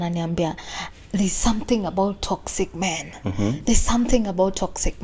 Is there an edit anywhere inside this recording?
no; 0 cuts

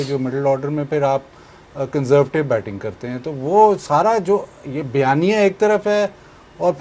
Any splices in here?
no; 0 cuts

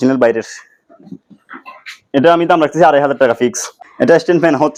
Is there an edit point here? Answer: no; 0 cuts

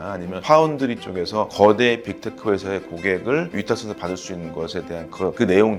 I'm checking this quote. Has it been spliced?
no; 0 cuts

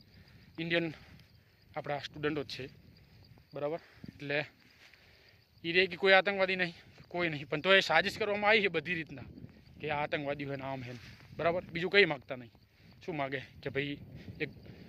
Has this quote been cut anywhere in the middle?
no; 0 cuts

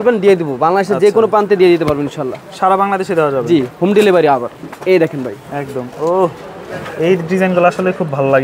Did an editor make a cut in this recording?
no; 0 cuts

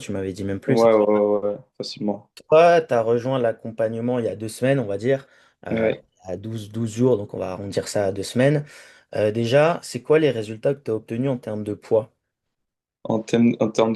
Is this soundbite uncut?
no; 1 cut; at 2.4 s

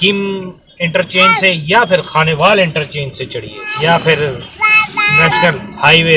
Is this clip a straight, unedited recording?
no; 1 cut; at 3.6 s

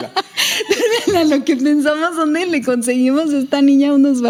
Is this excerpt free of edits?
yes; 0 cuts

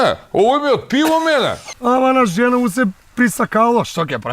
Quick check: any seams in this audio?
yes; 1 cut; at 1.6 s

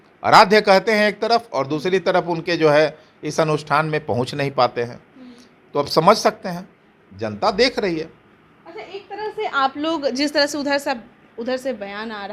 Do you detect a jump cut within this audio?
no; 0 cuts

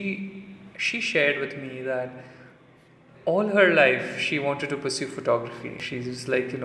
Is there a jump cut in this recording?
yes; 1 cut; at 5.7 s

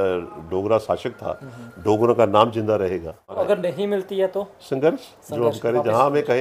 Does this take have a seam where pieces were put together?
yes; 1 cut; at 3.7 s

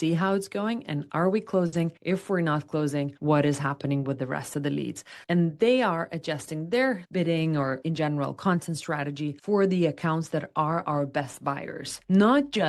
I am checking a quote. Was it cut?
yes; 1 cut; at 7.1 s

